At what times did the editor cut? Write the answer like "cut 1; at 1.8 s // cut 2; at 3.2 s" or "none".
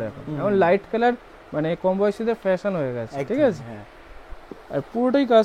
none